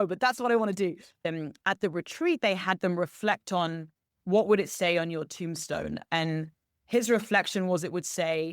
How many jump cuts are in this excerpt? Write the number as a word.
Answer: one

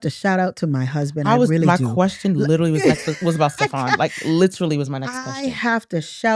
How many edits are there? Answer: zero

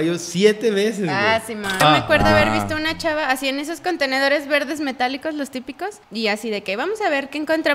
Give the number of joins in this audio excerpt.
two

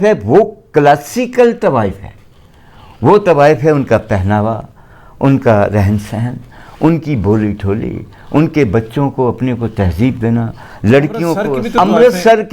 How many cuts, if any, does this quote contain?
one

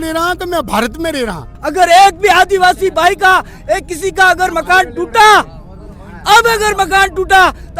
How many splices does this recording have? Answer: one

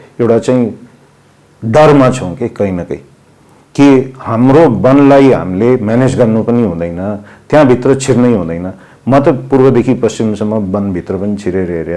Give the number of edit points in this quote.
zero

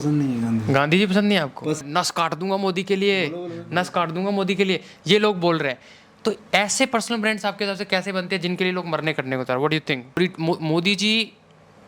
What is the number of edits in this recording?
two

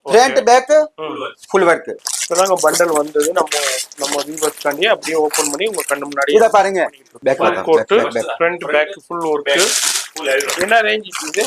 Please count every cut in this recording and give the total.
two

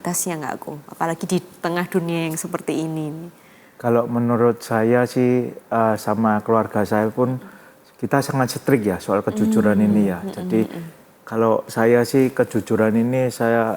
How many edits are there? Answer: zero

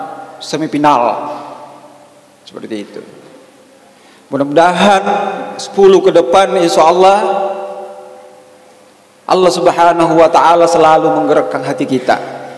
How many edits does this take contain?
zero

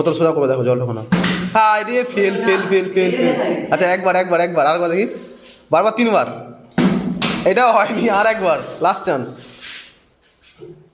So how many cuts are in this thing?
zero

